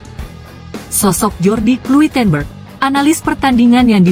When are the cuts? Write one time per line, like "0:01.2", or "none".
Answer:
0:00.9